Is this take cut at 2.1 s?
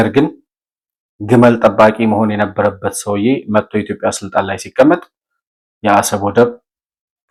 no; 0 cuts

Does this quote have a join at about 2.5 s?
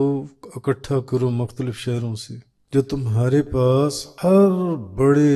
yes; 2 cuts; at 2.5 s, 4.1 s

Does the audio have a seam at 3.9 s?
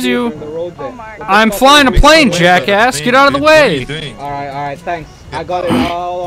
no; 0 cuts

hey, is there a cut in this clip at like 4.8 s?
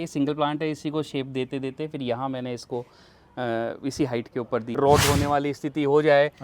yes; 1 cut; at 4.8 s

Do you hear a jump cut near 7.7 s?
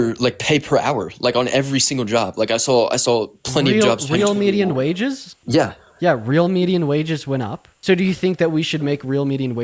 yes; 1 cut; at 7.7 s

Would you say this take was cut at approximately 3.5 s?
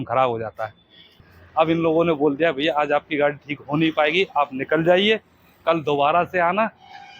no; 1 cut; at 1.1 s

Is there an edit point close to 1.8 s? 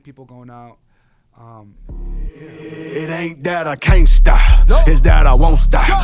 yes; 1 cut; at 1.8 s

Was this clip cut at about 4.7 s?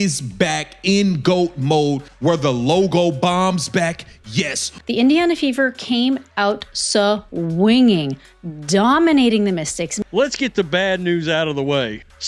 yes; 3 cuts; at 2.1 s, 4.7 s, 10.0 s

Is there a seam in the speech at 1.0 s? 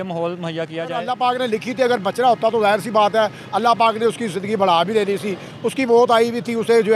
yes; 1 cut; at 1.0 s

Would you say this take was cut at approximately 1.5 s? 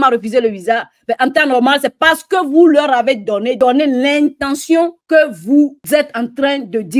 no; 3 cuts; at 3.6 s, 5.0 s, 5.8 s

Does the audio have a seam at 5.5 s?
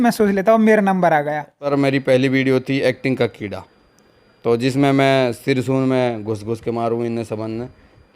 no; 1 cut; at 1.7 s

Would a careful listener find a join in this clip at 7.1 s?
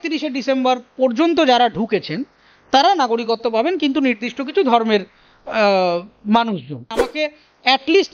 yes; 1 cut; at 7.1 s

